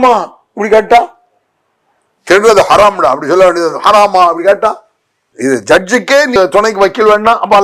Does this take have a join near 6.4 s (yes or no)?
yes